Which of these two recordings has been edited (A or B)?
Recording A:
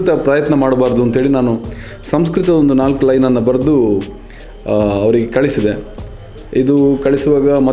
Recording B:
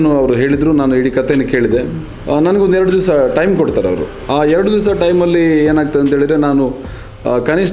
B